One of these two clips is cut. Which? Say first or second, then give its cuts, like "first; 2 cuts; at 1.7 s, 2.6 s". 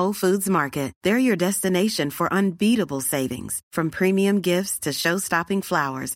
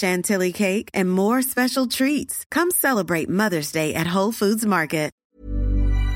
second; 1 cut; at 5.2 s